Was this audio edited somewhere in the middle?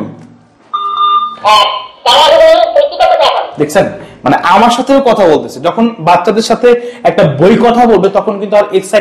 no; 0 cuts

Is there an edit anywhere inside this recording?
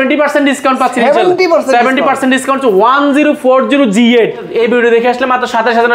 yes; 1 cut; at 4.5 s

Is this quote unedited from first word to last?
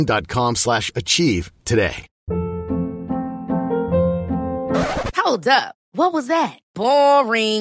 no; 1 cut; at 2.1 s

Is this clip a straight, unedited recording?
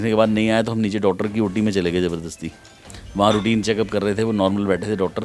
yes; 0 cuts

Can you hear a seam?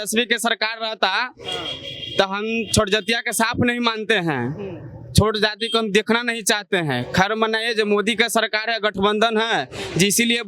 no; 0 cuts

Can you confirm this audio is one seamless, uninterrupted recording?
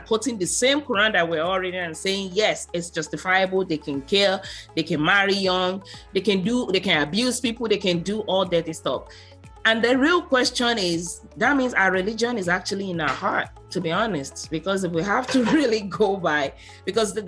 yes; 0 cuts

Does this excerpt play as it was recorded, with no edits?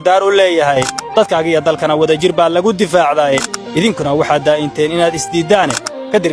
yes; 0 cuts

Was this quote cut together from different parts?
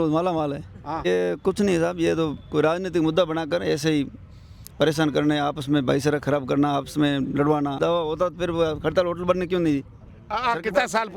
yes; 2 cuts; at 1.1 s, 7.8 s

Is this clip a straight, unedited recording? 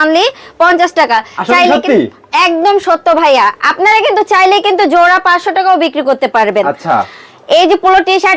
yes; 0 cuts

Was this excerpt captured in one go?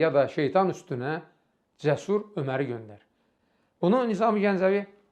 yes; 0 cuts

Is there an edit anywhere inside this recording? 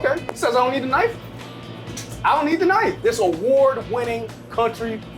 yes; 1 cut; at 3.0 s

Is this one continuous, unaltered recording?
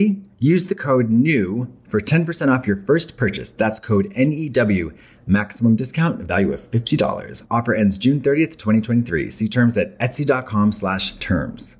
yes; 0 cuts

